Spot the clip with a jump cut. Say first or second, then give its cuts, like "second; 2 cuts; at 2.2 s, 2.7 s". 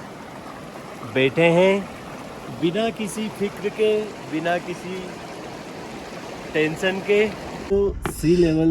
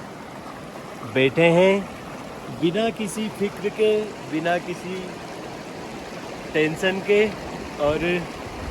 first; 1 cut; at 7.7 s